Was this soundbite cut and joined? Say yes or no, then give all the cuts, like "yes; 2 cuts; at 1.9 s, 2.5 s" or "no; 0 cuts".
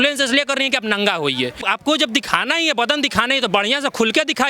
yes; 1 cut; at 1.6 s